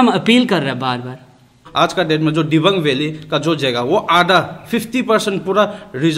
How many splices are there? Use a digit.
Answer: 1